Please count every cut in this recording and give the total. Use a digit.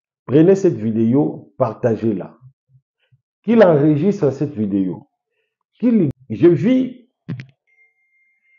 1